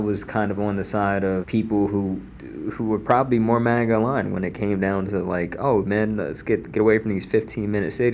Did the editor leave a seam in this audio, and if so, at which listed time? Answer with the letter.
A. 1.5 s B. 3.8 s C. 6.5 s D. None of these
A